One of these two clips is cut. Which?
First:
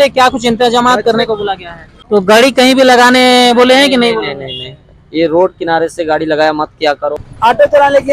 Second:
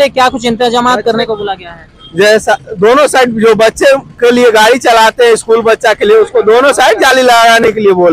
first; 2 cuts; at 1.9 s, 7.3 s

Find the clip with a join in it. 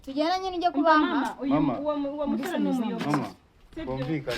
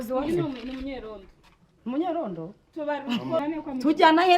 second; 1 cut; at 3.4 s

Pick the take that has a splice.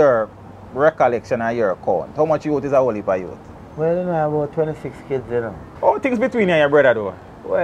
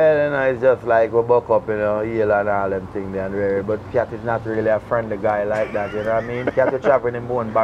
first; 1 cut; at 5.7 s

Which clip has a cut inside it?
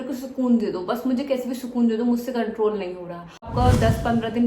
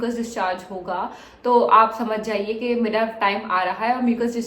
first; 1 cut; at 3.5 s

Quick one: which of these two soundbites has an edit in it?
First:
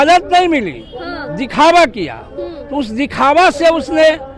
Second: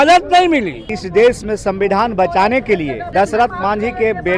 second; 2 cuts; at 1.0 s, 3.0 s

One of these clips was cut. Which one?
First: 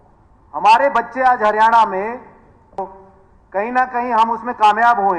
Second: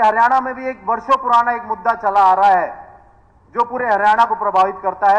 first; 1 cut; at 2.8 s

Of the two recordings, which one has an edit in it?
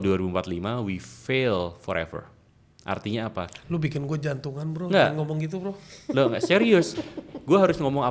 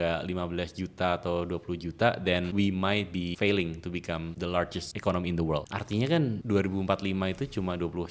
second; 5 cuts; at 2.5 s, 3.3 s, 4.6 s, 5.7 s, 6.4 s

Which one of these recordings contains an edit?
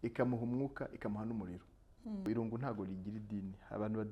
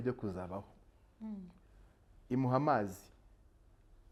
first; 1 cut; at 2.3 s

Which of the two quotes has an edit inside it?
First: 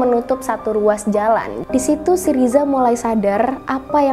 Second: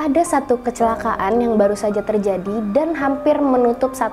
first; 1 cut; at 1.6 s

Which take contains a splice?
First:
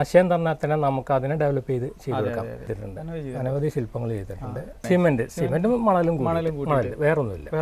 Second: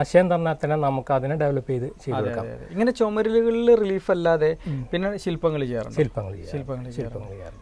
first; 2 cuts; at 2.7 s, 4.8 s

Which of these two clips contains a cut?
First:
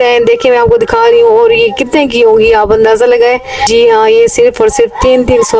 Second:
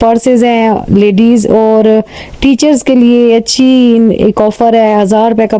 first; 1 cut; at 3.6 s

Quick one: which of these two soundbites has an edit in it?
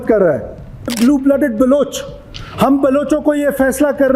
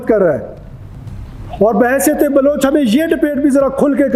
first; 1 cut; at 0.9 s

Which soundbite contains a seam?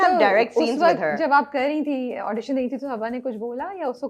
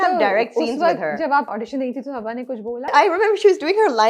second; 2 cuts; at 1.5 s, 2.9 s

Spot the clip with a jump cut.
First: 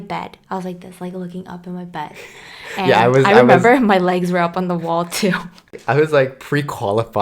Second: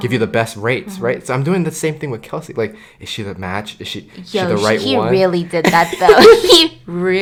first; 1 cut; at 5.7 s

